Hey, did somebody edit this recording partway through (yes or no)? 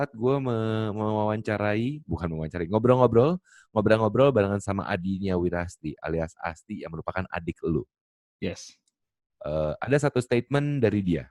no